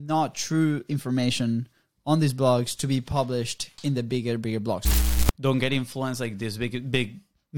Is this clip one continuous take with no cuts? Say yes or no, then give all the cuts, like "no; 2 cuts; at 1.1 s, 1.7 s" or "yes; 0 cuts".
no; 1 cut; at 4.9 s